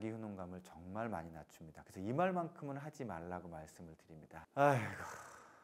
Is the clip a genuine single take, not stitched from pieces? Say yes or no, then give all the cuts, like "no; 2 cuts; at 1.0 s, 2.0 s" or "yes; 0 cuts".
no; 1 cut; at 4.4 s